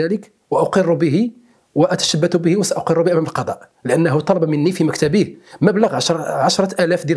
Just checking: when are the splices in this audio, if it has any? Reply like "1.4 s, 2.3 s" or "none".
none